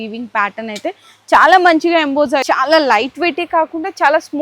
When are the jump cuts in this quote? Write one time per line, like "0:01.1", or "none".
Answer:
0:02.4